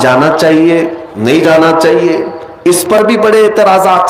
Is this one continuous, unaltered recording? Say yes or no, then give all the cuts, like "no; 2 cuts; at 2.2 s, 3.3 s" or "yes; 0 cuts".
yes; 0 cuts